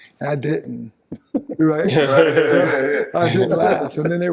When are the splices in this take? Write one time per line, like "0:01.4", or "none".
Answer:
none